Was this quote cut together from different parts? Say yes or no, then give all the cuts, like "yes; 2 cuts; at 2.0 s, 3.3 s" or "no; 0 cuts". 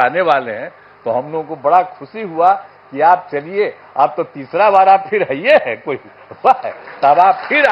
no; 0 cuts